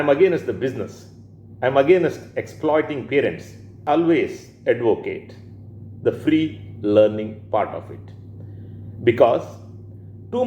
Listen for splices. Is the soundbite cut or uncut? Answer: cut